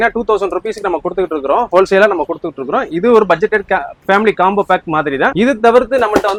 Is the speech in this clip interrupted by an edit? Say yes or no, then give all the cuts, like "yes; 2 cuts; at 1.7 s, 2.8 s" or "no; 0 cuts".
no; 0 cuts